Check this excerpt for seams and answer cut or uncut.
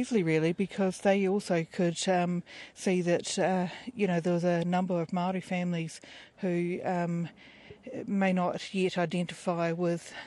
cut